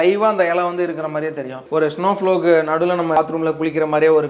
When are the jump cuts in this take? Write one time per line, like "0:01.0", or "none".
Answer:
0:01.7
0:03.2